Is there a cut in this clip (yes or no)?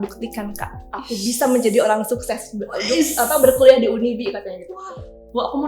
yes